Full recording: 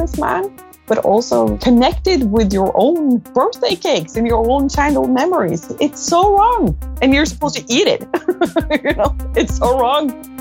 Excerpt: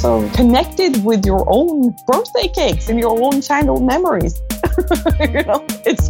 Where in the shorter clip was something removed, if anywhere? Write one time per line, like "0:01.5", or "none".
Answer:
0:04.5